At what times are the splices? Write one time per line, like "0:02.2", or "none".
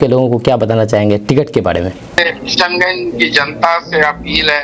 0:02.2